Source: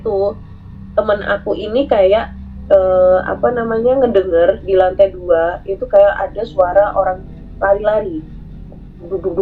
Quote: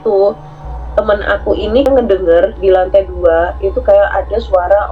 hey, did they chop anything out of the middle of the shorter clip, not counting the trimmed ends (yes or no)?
yes